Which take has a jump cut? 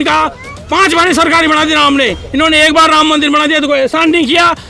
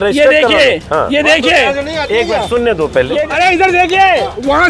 second; 1 cut; at 3.2 s

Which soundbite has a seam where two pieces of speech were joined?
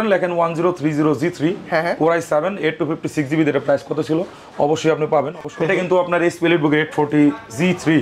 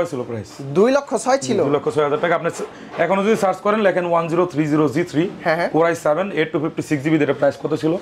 first; 1 cut; at 5.3 s

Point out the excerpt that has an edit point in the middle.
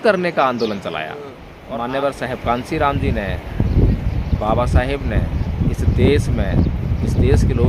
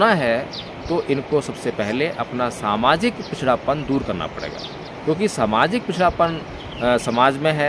first; 1 cut; at 1.5 s

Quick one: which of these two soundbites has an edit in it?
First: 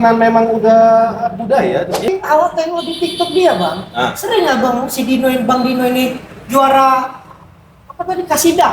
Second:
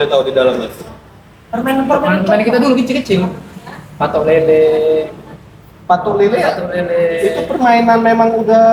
first; 1 cut; at 2.1 s

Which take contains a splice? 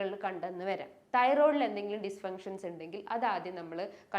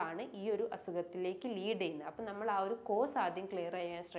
first; 1 cut; at 0.9 s

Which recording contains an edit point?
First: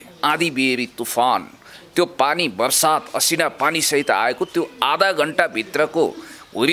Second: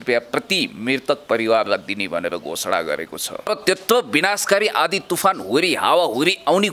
second; 1 cut; at 3.5 s

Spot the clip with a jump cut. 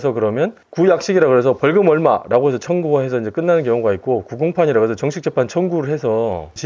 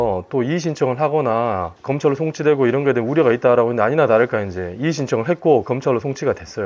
second; 1 cut; at 1.8 s

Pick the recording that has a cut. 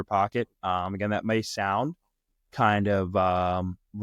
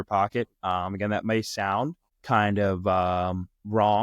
second; 1 cut; at 2.1 s

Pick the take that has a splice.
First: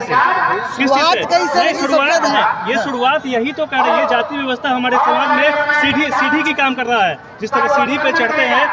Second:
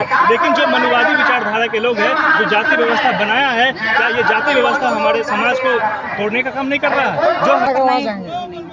second; 1 cut; at 7.7 s

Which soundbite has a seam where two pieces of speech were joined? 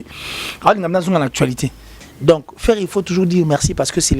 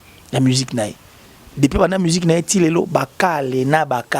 first; 1 cut; at 1.9 s

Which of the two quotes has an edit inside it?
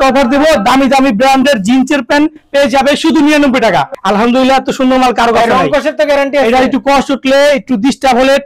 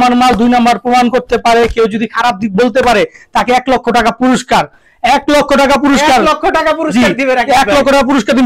first; 1 cut; at 3.9 s

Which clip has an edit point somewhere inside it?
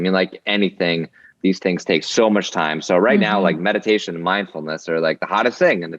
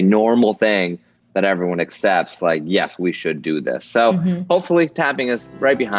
first; 1 cut; at 1.6 s

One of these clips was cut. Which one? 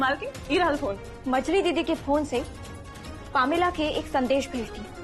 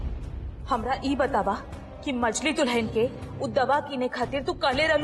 first; 1 cut; at 1.1 s

